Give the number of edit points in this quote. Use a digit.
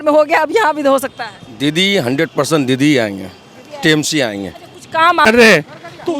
1